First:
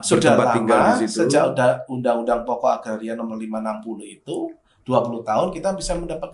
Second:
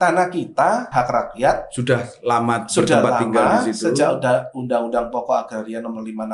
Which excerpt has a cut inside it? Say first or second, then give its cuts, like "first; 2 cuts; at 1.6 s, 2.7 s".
second; 1 cut; at 0.9 s